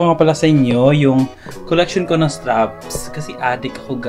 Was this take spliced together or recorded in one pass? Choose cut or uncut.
uncut